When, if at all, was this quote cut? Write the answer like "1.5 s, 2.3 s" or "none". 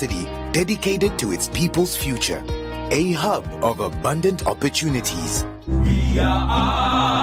none

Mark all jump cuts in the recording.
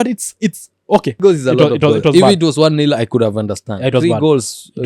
1.2 s

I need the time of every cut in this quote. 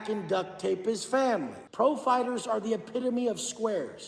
1.6 s

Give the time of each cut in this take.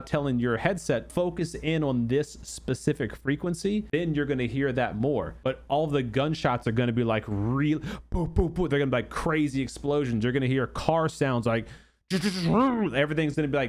1.1 s, 3.9 s, 5.3 s

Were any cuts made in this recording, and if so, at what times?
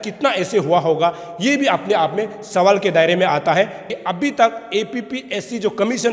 3.9 s

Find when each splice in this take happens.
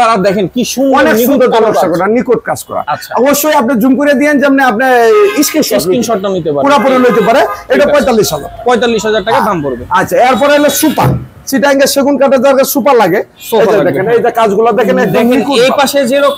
none

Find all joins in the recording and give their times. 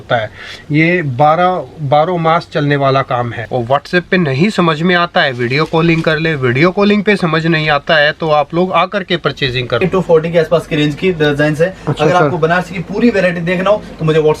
3.4 s, 9.8 s

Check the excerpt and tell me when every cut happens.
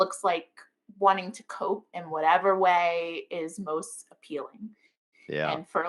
none

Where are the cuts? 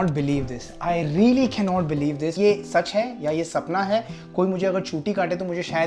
none

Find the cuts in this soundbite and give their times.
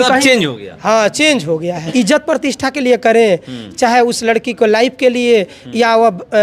1.9 s

